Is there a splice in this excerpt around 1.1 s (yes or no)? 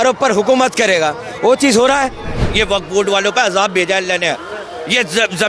no